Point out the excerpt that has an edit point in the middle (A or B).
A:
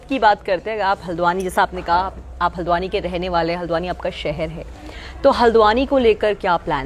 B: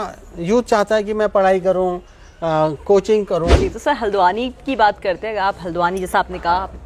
B